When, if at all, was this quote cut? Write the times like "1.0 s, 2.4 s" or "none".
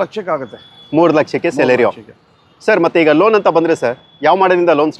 none